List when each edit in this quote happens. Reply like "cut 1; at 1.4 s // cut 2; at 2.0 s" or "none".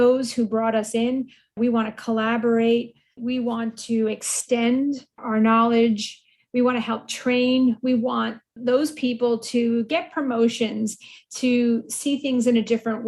cut 1; at 1.6 s